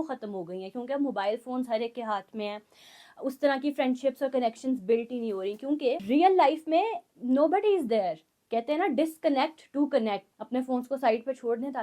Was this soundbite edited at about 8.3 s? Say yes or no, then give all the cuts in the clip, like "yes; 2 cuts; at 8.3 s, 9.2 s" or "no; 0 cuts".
yes; 3 cuts; at 6.0 s, 8.3 s, 10.3 s